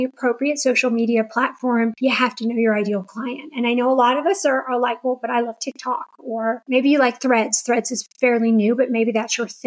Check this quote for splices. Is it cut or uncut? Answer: cut